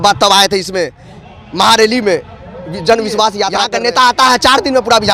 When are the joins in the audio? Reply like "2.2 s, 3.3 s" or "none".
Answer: 3.6 s